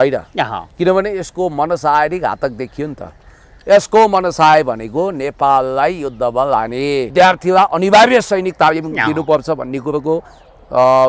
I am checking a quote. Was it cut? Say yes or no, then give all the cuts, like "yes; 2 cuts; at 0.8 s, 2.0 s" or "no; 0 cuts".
yes; 1 cut; at 7.1 s